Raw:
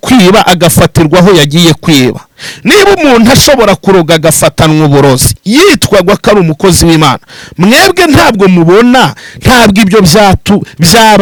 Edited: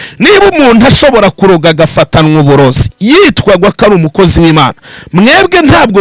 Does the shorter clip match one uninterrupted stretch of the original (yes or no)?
yes